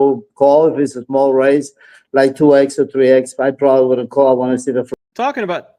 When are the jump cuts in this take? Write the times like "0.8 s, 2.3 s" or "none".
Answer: 4.9 s